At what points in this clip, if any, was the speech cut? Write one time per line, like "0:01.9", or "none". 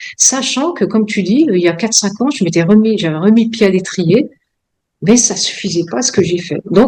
none